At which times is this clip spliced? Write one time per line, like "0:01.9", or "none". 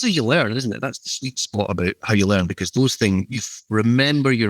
0:03.4